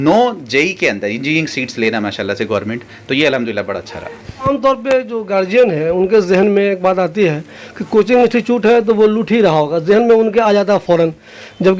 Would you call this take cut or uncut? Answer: uncut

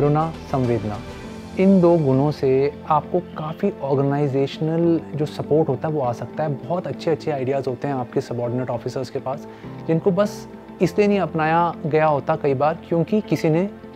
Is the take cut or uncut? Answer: cut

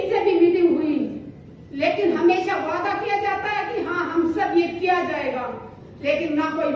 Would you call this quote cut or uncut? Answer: uncut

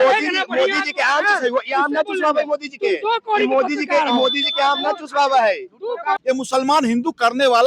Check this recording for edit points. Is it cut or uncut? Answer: cut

